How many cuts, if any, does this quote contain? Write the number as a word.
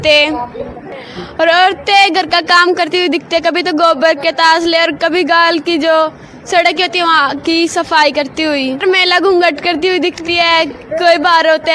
two